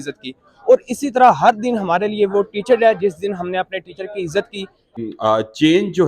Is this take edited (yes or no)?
yes